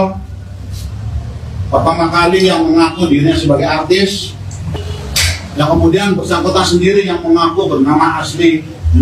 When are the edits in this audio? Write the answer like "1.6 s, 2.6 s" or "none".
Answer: 4.8 s